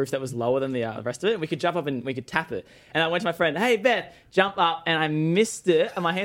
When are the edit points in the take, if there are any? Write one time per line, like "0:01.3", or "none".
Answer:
0:02.8